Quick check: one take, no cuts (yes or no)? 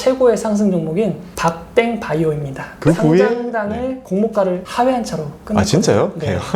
no